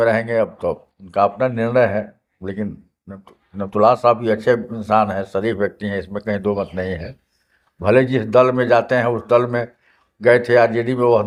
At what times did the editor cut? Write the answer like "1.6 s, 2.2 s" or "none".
none